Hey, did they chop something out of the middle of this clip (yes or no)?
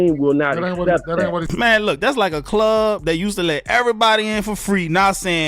yes